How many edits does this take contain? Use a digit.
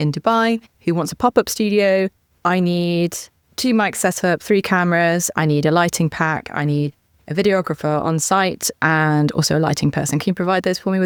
0